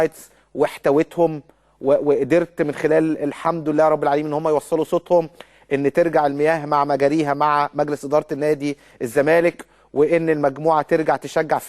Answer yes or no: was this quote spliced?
yes